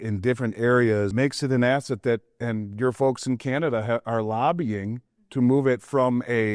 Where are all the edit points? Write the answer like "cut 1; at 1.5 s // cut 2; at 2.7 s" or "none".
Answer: cut 1; at 1.1 s